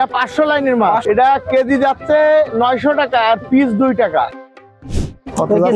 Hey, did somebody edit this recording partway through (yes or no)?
yes